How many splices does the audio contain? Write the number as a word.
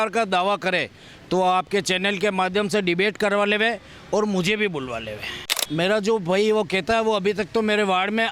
one